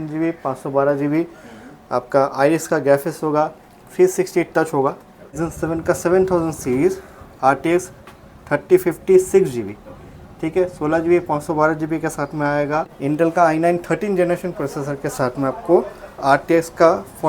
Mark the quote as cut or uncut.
cut